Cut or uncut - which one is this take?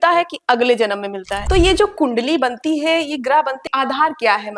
cut